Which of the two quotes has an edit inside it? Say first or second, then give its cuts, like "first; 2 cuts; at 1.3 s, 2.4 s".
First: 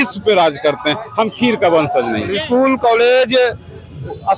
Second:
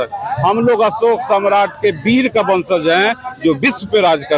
first; 1 cut; at 2.4 s